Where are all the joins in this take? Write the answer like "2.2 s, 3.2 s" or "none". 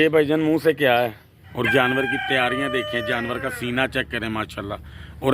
1.5 s